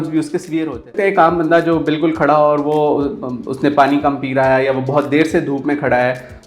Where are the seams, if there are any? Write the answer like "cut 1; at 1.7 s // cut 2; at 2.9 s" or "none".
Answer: cut 1; at 0.9 s